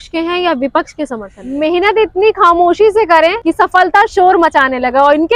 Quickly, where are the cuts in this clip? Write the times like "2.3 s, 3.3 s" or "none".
1.4 s, 3.4 s

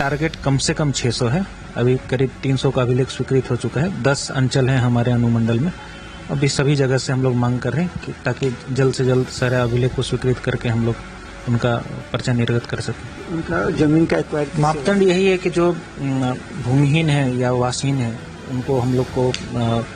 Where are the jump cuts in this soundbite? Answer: 14.5 s

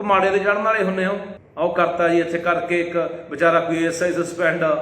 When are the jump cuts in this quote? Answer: 1.4 s

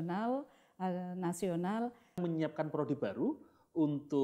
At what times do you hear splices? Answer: 2.2 s

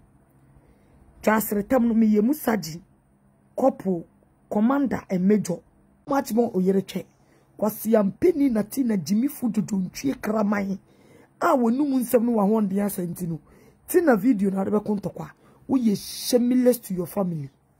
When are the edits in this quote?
6.1 s

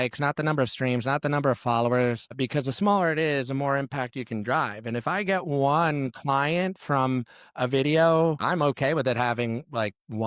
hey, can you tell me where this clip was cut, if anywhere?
2.3 s, 8.4 s

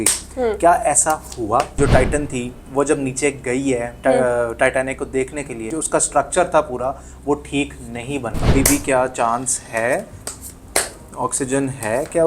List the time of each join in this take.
1.8 s, 5.7 s, 8.3 s

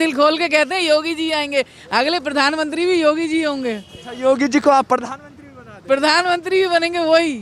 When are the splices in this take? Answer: none

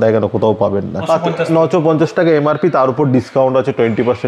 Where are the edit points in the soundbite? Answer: 1.0 s

